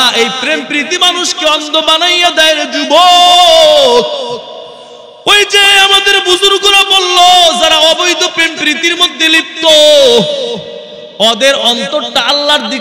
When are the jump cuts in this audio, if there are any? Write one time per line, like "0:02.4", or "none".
none